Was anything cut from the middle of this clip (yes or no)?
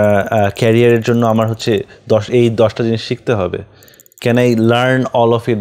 no